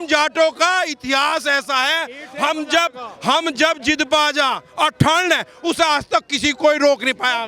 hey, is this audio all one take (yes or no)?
yes